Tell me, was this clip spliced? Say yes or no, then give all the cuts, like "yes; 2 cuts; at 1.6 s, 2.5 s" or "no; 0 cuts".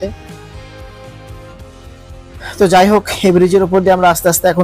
yes; 1 cut; at 1.5 s